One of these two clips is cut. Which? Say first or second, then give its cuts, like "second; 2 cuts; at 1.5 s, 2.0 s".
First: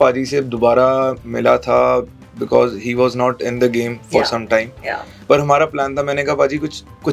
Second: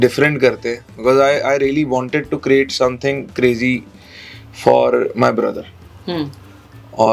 first; 1 cut; at 5.2 s